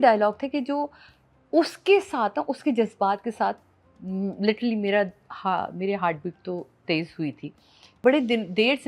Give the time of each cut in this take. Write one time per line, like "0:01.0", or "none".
0:08.0